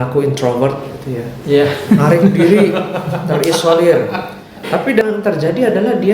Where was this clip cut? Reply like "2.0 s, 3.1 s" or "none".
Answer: 5.0 s